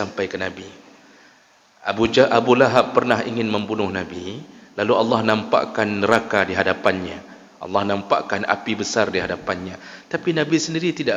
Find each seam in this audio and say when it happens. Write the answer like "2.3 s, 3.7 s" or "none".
none